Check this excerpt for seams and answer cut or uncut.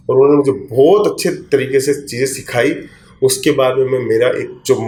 uncut